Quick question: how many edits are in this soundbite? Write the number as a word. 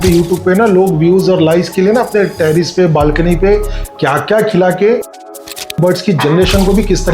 one